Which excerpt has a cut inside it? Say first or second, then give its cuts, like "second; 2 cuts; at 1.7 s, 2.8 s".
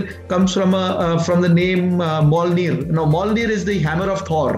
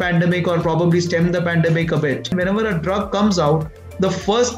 second; 1 cut; at 2.3 s